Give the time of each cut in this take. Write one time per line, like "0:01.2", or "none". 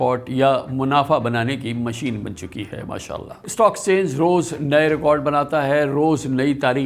none